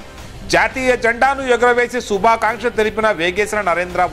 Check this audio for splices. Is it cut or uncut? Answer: uncut